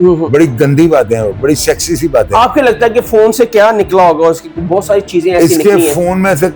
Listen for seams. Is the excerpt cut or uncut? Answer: uncut